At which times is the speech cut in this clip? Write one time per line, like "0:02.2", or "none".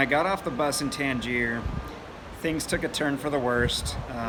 none